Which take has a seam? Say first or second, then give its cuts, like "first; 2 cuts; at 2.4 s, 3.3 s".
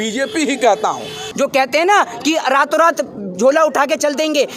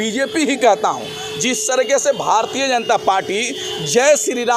first; 1 cut; at 1.2 s